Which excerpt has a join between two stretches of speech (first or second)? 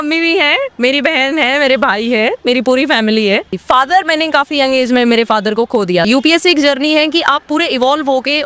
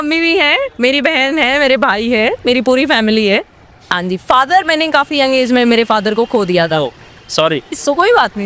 first